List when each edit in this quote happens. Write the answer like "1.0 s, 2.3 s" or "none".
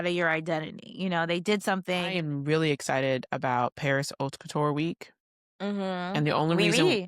2.2 s